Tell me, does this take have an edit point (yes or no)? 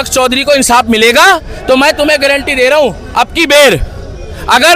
no